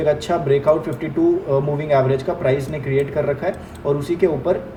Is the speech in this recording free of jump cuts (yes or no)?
yes